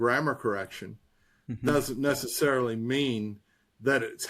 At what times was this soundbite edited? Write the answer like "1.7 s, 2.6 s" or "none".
1.5 s